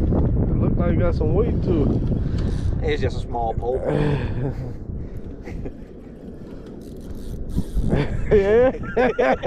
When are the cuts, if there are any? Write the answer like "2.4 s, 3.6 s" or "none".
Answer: none

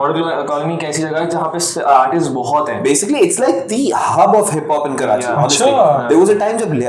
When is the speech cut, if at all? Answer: none

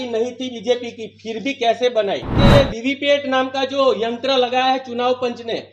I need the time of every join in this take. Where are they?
2.4 s

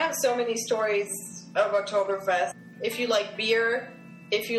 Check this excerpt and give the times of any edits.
2.5 s

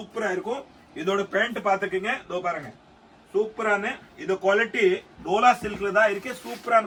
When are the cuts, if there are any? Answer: none

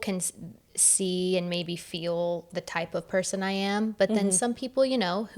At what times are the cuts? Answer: none

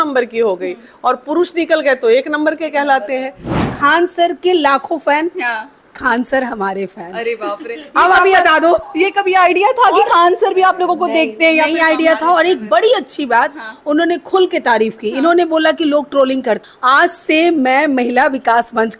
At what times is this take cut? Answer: 3.5 s, 16.7 s

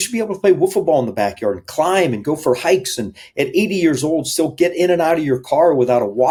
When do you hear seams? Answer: none

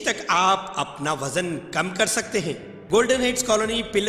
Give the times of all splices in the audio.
2.7 s

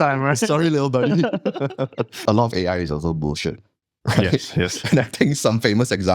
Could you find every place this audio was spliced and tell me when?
2.2 s

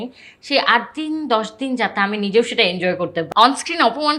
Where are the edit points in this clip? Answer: 3.3 s

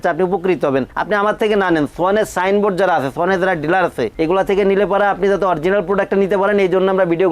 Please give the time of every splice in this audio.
4.1 s

